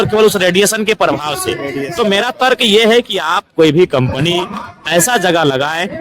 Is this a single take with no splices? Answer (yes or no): yes